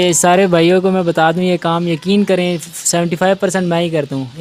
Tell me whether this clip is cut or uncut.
uncut